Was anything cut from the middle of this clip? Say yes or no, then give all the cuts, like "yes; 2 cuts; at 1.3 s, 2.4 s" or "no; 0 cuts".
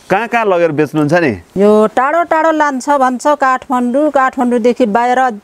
yes; 1 cut; at 1.4 s